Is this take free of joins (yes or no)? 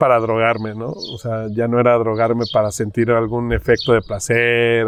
yes